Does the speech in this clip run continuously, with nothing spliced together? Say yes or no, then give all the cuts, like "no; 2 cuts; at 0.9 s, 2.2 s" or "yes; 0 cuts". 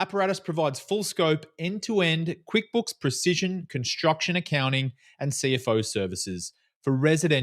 yes; 0 cuts